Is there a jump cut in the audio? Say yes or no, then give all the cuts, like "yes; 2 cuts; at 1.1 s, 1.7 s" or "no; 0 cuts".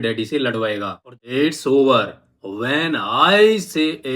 yes; 1 cut; at 1.1 s